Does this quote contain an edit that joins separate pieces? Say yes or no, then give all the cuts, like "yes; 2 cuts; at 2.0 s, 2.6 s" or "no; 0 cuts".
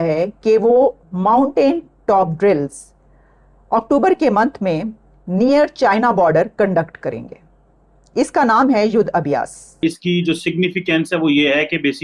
yes; 1 cut; at 9.8 s